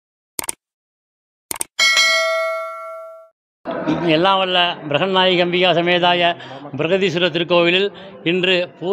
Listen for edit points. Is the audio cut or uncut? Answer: cut